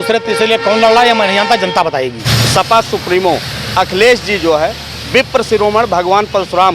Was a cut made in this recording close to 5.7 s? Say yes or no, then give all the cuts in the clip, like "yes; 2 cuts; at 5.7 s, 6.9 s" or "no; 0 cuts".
no; 1 cut; at 2.4 s